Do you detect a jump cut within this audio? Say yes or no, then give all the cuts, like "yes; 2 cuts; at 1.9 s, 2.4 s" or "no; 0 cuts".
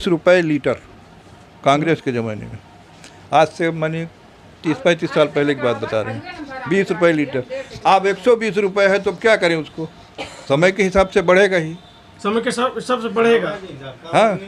no; 0 cuts